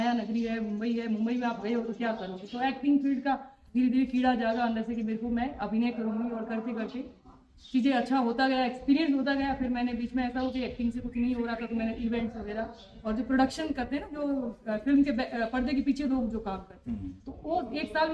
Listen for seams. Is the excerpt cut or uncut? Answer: uncut